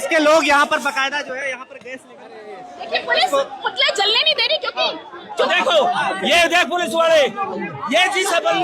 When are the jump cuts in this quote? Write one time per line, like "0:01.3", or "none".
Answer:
0:05.5